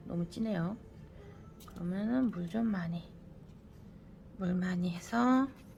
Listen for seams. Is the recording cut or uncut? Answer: uncut